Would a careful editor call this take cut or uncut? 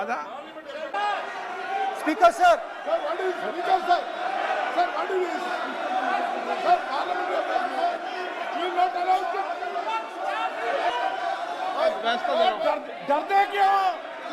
cut